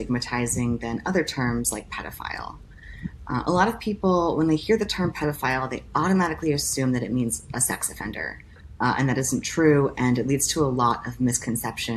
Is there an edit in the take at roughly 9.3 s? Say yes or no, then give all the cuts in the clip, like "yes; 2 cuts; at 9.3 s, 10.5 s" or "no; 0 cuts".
yes; 1 cut; at 9.3 s